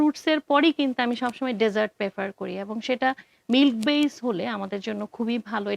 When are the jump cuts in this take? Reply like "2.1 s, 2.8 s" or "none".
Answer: none